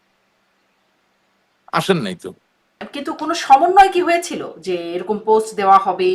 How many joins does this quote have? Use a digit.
1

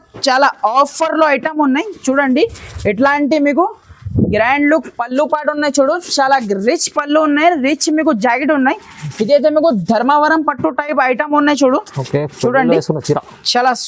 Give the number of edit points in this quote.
0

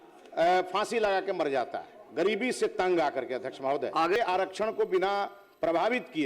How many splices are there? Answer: 1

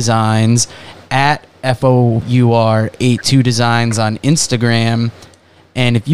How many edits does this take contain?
1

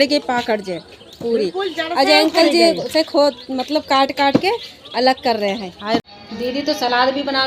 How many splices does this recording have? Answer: 1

